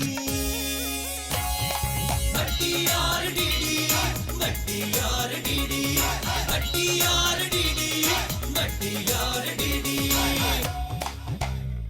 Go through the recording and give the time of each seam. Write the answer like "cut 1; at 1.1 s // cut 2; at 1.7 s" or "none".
cut 1; at 10.6 s